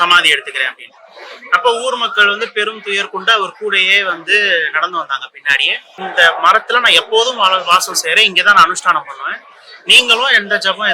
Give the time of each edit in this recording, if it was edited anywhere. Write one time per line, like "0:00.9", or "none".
0:06.0